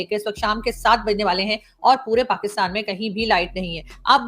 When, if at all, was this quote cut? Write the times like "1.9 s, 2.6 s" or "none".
none